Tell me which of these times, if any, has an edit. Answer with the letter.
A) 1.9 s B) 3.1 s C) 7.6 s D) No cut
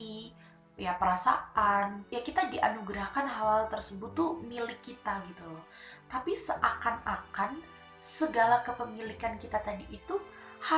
D